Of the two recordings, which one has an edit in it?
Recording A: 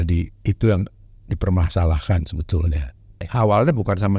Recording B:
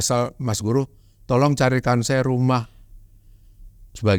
A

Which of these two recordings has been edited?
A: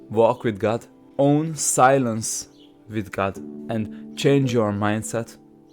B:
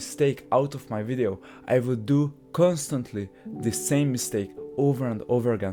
A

